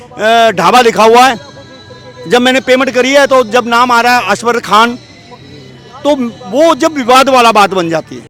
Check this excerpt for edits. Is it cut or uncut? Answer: uncut